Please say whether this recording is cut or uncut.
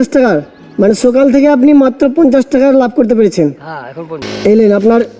cut